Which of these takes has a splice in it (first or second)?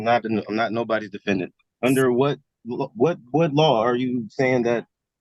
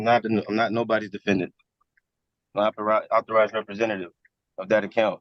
first